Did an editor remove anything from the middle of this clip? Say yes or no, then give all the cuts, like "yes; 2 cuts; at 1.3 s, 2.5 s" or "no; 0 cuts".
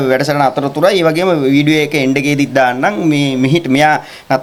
no; 0 cuts